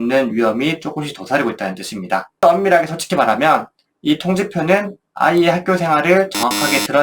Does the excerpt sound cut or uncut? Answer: cut